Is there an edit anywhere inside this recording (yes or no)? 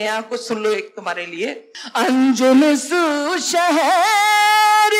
yes